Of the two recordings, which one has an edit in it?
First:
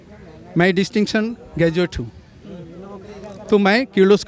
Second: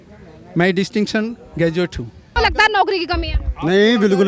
second; 1 cut; at 2.4 s

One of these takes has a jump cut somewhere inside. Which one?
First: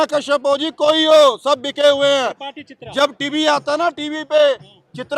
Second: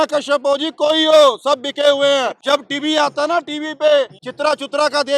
second; 2 cuts; at 2.4 s, 4.2 s

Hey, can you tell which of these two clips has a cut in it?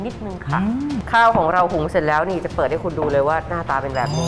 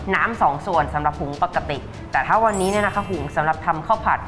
first; 1 cut; at 1.0 s

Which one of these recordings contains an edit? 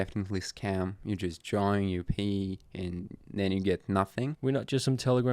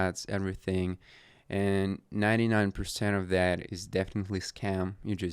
first; 1 cut; at 4.3 s

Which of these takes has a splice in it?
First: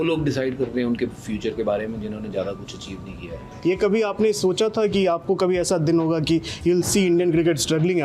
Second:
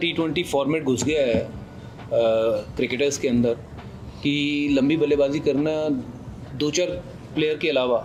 first; 1 cut; at 3.5 s

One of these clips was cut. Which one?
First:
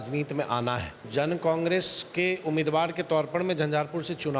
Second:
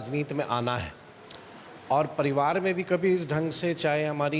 first; 1 cut; at 1.0 s

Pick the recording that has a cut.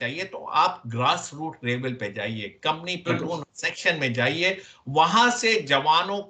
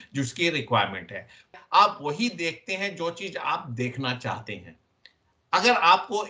second; 1 cut; at 1.6 s

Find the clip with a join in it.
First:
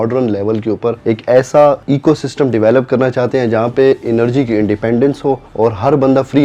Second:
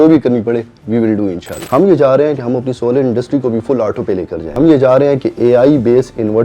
second; 2 cuts; at 1.5 s, 4.5 s

